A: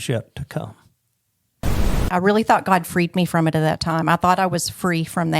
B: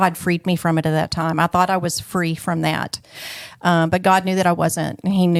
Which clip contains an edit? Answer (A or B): A